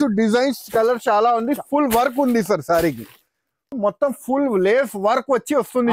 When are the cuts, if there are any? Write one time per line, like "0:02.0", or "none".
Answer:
0:03.7